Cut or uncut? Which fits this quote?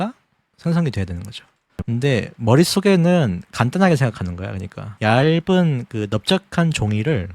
cut